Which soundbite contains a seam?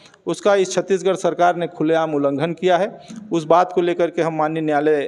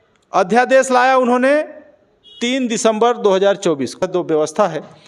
second; 1 cut; at 4.0 s

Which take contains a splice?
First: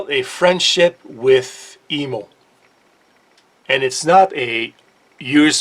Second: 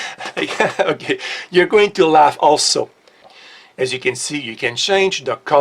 second; 1 cut; at 2.6 s

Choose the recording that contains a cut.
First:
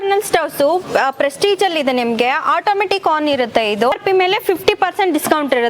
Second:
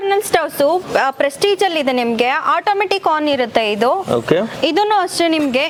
first; 1 cut; at 3.9 s

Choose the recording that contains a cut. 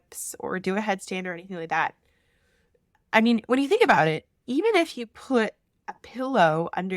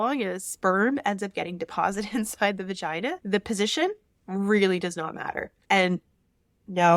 second; 2 cuts; at 3.2 s, 5.5 s

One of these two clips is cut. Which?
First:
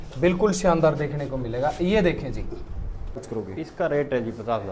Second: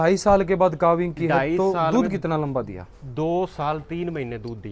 first; 1 cut; at 3.3 s

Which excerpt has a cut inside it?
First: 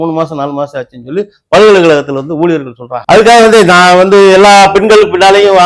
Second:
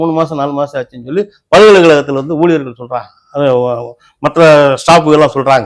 first; 1 cut; at 3.0 s

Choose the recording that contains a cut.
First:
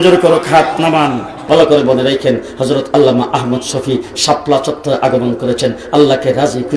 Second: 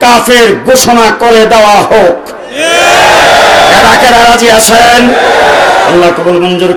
first; 1 cut; at 1.4 s

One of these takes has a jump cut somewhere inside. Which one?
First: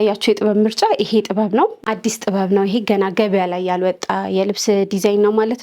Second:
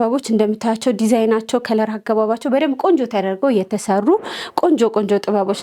first; 1 cut; at 1.8 s

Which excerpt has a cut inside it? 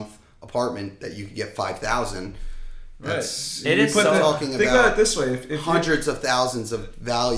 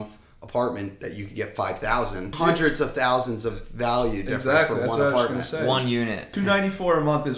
second; 2 cuts; at 2.3 s, 6.3 s

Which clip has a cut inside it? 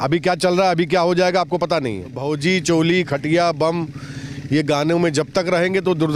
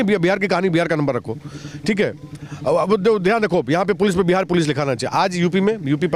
first; 1 cut; at 2.1 s

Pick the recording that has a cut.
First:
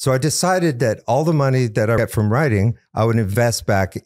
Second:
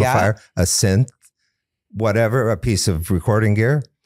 first; 1 cut; at 2.0 s

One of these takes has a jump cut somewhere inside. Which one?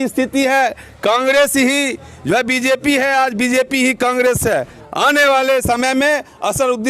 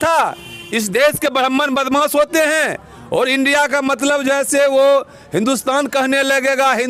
first; 1 cut; at 4.8 s

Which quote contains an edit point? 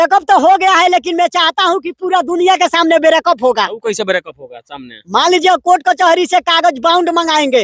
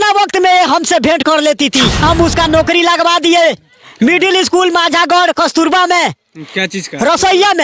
second; 1 cut; at 2.0 s

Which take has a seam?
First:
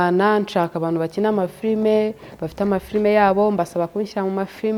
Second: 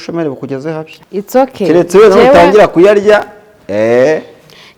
second; 1 cut; at 0.9 s

